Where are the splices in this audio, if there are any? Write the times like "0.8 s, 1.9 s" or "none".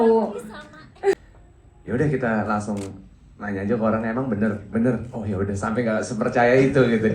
1.1 s